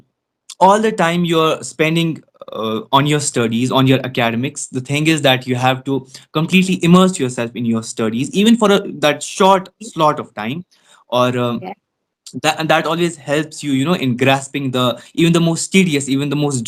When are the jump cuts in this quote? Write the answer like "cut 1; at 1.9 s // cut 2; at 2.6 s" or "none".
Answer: none